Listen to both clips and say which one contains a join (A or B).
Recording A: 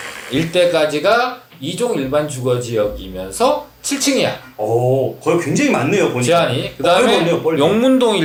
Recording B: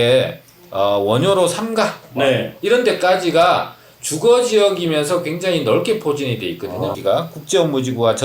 B